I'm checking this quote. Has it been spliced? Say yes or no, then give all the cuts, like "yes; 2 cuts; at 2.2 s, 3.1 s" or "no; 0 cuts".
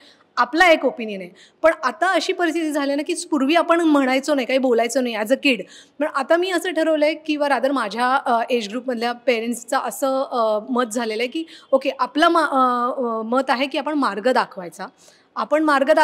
no; 0 cuts